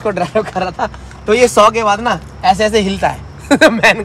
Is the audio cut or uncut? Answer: uncut